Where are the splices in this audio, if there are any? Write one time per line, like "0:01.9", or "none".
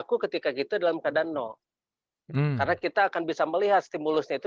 none